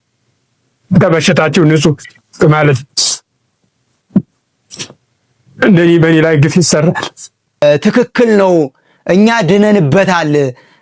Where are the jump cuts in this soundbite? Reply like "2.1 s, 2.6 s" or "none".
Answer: 7.6 s

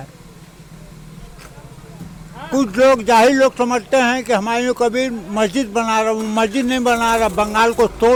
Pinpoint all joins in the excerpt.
none

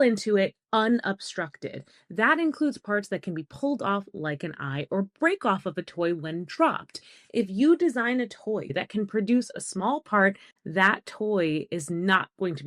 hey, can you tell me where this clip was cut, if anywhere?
8.7 s, 10.5 s

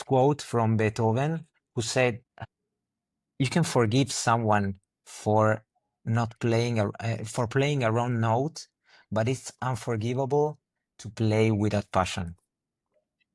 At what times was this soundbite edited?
none

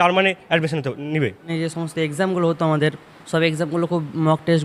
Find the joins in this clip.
1.4 s, 3.1 s

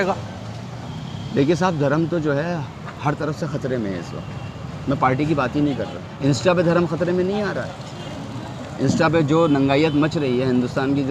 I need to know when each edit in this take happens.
6.0 s

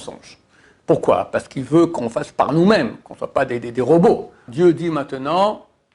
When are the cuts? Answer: 4.4 s

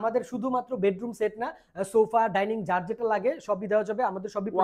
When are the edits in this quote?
none

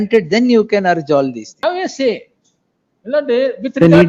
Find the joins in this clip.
1.6 s

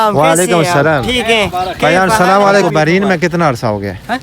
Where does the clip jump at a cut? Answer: 2.7 s

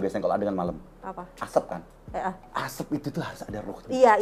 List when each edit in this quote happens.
2.4 s

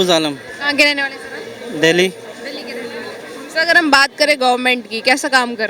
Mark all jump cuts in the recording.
none

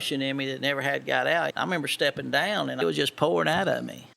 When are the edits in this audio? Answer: 1.5 s, 2.8 s

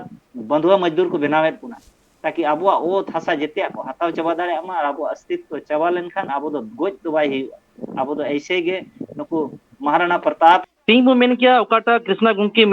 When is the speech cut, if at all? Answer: 10.6 s

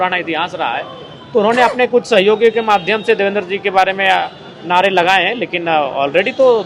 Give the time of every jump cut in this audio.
none

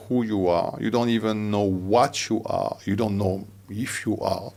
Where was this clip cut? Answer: none

